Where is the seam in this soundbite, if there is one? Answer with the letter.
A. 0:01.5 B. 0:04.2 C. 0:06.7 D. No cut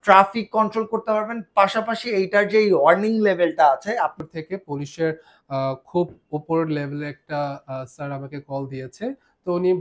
B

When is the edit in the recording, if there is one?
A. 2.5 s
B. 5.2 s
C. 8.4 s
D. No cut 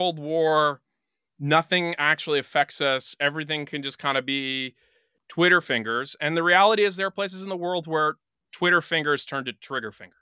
B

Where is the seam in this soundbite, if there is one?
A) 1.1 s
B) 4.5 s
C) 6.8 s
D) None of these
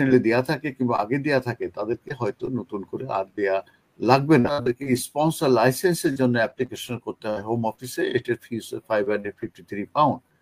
B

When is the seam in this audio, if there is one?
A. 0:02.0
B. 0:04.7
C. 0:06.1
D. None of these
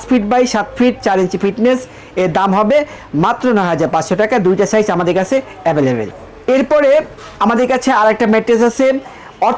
D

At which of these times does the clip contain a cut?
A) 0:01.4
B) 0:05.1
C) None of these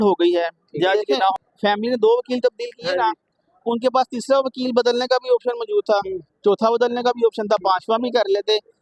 A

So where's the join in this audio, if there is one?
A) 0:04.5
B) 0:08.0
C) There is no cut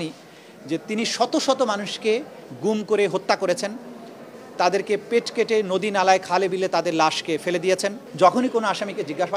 B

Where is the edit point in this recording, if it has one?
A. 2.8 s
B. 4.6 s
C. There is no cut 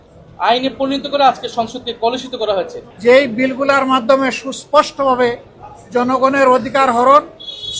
A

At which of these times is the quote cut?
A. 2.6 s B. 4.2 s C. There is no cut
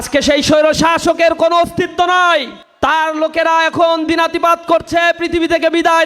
A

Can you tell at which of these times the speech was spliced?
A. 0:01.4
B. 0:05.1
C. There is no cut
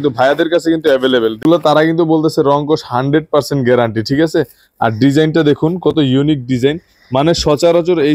A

